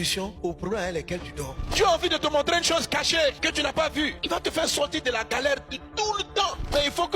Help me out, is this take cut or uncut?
cut